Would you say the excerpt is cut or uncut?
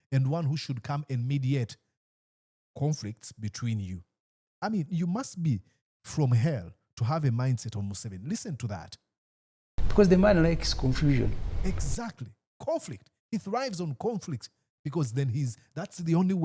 uncut